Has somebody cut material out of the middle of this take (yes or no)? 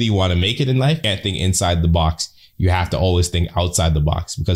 yes